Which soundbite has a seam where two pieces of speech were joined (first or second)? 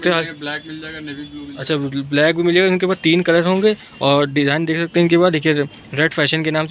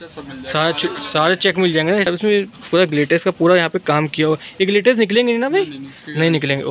second